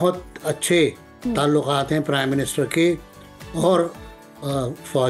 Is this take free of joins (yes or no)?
yes